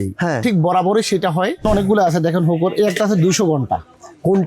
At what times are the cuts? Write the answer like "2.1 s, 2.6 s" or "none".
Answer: 1.6 s